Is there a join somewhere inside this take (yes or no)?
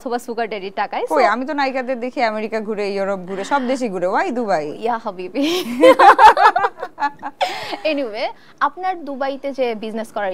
no